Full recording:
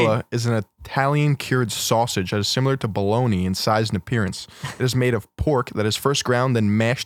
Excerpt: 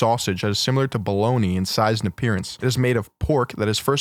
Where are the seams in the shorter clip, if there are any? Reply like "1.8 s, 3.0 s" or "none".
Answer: 2.5 s